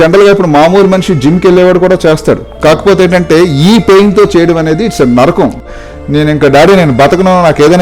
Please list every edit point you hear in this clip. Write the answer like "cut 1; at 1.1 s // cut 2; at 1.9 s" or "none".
cut 1; at 5.7 s